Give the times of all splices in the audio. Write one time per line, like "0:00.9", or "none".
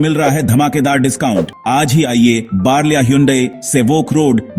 0:01.6